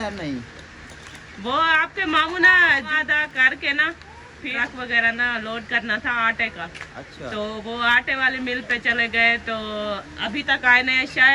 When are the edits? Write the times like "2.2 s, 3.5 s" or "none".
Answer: 2.9 s, 4.5 s